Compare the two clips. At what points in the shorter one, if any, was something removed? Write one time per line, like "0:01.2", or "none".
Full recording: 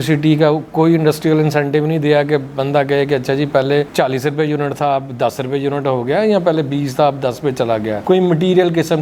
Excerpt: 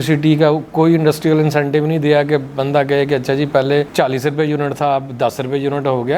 none